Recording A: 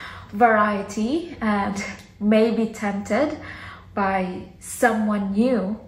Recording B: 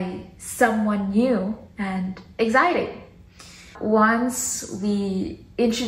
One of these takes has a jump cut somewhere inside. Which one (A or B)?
B